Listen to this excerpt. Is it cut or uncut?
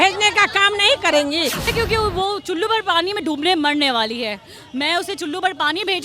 cut